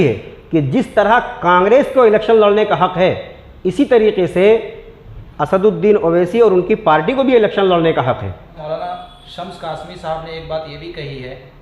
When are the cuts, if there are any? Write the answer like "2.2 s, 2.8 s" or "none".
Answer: 8.7 s